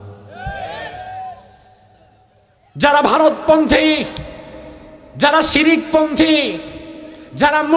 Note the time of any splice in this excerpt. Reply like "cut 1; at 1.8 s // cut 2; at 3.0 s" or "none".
none